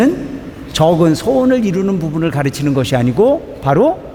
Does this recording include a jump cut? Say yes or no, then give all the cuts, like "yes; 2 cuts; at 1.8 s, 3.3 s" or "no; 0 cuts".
no; 0 cuts